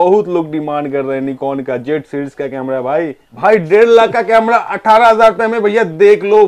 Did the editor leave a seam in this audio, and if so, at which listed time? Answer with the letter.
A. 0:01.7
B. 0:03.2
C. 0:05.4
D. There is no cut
B